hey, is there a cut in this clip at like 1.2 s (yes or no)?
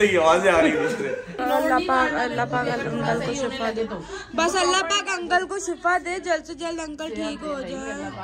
yes